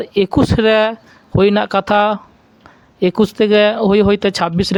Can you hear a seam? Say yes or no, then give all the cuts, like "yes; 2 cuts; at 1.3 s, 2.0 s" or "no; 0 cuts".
no; 0 cuts